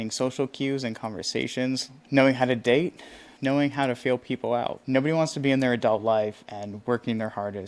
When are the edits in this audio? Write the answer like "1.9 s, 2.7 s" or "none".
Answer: 1.9 s, 3.3 s, 4.8 s